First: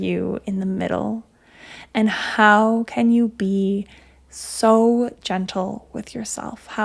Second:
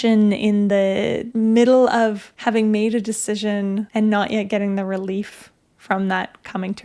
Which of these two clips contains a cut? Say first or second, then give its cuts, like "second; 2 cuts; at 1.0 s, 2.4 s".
second; 3 cuts; at 1.2 s, 2.3 s, 3.9 s